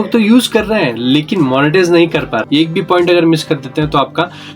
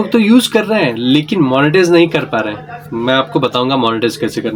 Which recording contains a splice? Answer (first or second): first